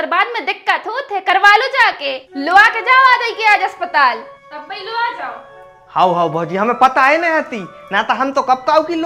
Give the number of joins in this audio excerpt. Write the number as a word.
zero